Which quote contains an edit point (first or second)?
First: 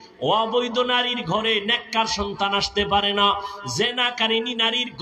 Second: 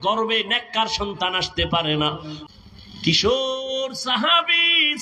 second